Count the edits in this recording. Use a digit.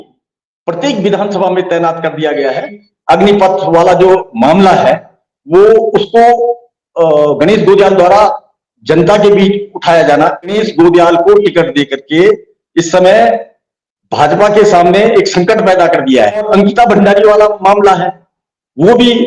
3